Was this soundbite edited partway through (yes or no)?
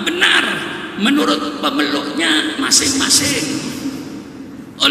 no